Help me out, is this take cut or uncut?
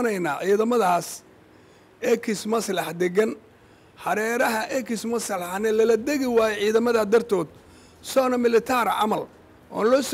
uncut